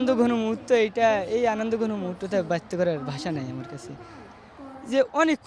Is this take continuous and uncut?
yes; 0 cuts

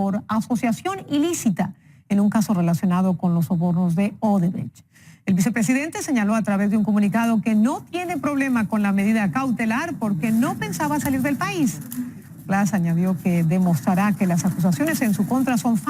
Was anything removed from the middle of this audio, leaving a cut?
yes; 1 cut; at 8.7 s

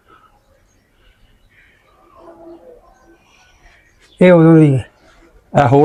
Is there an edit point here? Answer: no; 0 cuts

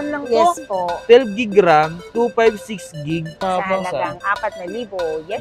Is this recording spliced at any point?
yes; 2 cuts; at 1.0 s, 3.4 s

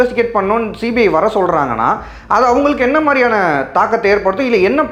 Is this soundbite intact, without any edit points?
yes; 0 cuts

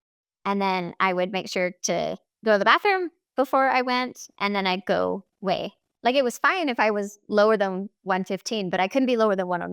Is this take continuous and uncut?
no; 1 cut; at 5.8 s

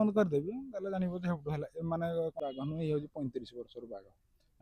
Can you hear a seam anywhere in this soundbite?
yes; 1 cut; at 2.4 s

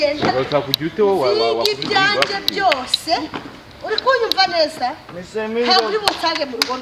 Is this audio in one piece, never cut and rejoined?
yes; 0 cuts

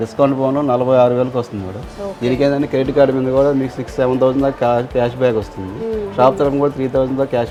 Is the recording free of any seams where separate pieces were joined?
yes; 0 cuts

